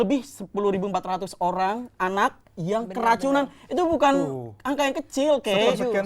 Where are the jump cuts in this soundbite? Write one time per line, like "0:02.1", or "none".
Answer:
none